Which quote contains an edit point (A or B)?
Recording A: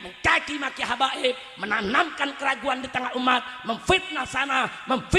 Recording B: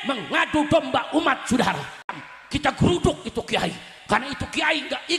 B